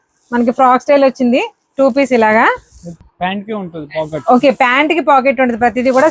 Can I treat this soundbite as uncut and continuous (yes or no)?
no